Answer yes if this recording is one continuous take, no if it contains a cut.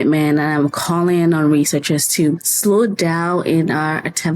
no